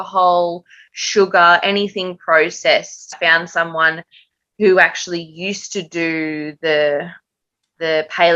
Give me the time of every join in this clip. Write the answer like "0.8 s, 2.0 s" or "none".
3.2 s